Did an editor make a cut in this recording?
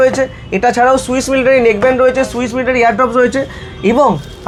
no; 0 cuts

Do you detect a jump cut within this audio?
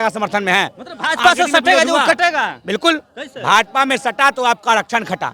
no; 0 cuts

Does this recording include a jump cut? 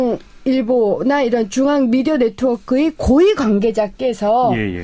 yes; 1 cut; at 2.8 s

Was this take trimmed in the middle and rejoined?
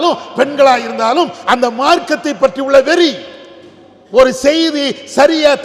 no; 0 cuts

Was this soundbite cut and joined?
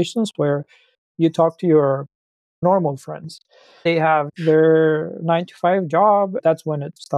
yes; 3 cuts; at 2.6 s, 3.8 s, 6.4 s

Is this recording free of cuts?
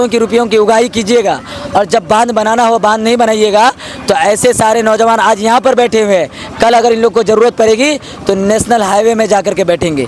yes; 0 cuts

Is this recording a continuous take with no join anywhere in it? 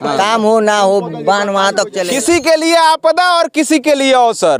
no; 1 cut; at 2.0 s

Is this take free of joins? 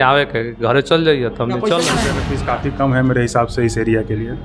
no; 1 cut; at 2.3 s

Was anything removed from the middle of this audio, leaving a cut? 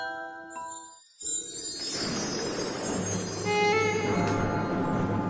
no; 0 cuts

